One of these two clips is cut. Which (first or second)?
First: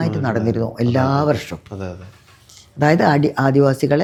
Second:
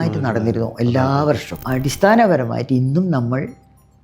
second